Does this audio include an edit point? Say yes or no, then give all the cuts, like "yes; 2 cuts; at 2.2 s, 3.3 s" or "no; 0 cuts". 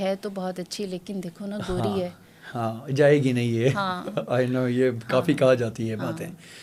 no; 0 cuts